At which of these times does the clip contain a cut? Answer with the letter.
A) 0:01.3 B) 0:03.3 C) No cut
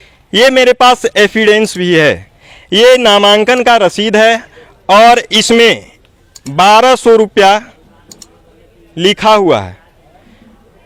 C